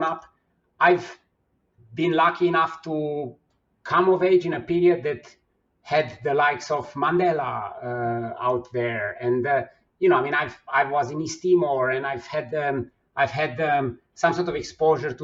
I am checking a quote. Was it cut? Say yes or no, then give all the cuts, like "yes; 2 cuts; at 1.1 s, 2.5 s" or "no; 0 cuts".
no; 0 cuts